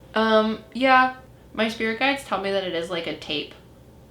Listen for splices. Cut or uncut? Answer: cut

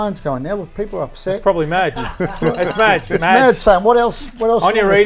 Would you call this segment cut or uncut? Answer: uncut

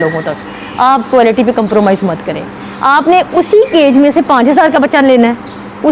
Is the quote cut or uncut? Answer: uncut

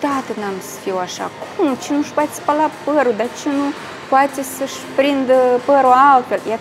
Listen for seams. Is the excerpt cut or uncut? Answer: uncut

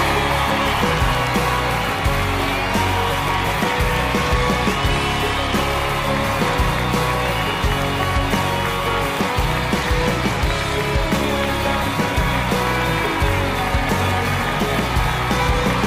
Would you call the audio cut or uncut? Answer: cut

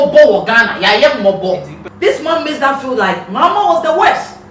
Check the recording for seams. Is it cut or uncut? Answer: cut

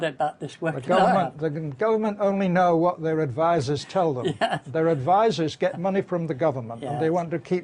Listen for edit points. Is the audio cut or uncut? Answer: uncut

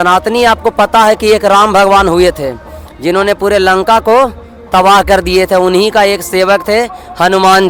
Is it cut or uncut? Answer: uncut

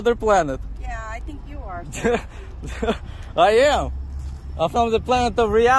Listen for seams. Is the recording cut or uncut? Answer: uncut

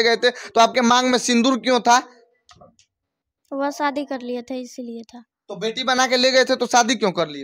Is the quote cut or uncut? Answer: uncut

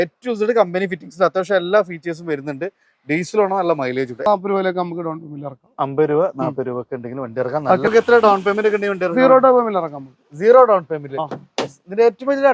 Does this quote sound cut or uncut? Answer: cut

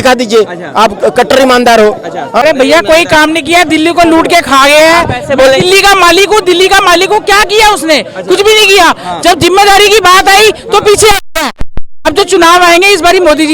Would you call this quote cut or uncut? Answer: cut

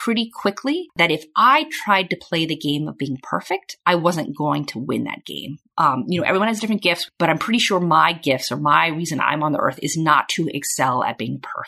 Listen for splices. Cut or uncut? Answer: cut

